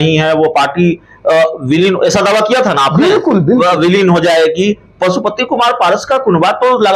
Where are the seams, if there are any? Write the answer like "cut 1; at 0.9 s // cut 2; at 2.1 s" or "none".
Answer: none